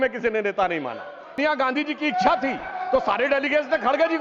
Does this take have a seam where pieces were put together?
yes; 1 cut; at 1.4 s

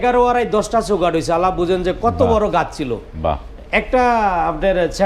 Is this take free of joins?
yes; 0 cuts

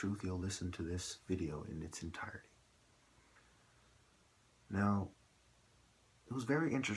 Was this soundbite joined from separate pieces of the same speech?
yes; 1 cut; at 2.4 s

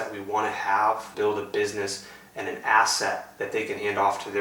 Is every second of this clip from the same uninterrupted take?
no; 1 cut; at 1.1 s

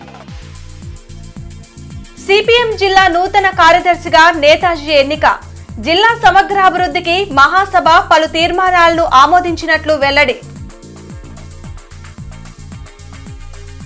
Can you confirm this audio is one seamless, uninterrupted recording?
no; 1 cut; at 1.5 s

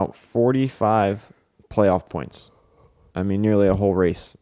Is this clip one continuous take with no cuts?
yes; 0 cuts

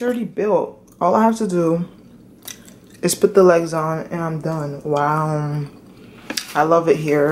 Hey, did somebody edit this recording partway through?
no; 0 cuts

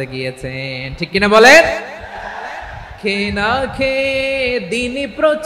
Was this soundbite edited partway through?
no; 0 cuts

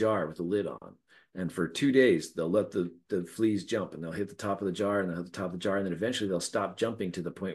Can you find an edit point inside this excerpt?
no; 0 cuts

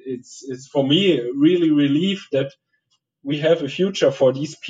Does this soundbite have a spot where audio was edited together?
no; 0 cuts

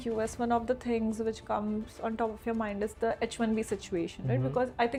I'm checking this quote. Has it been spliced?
no; 0 cuts

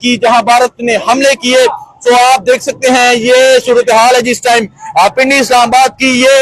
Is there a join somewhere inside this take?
no; 0 cuts

